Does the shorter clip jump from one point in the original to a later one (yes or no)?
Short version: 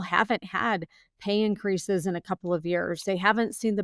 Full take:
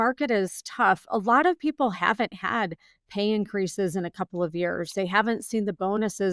no